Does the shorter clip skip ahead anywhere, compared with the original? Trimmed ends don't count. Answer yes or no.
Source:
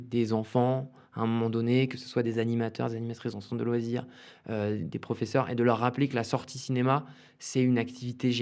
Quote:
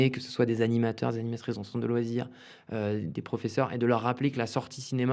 no